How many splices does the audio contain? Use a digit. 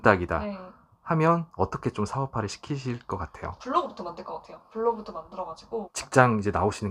2